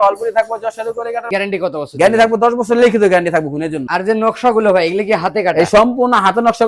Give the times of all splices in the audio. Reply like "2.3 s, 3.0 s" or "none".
1.2 s, 3.8 s